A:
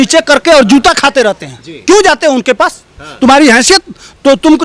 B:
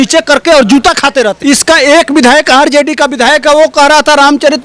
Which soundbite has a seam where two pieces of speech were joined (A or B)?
B